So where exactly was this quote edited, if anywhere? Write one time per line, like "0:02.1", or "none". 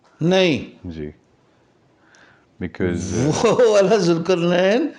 none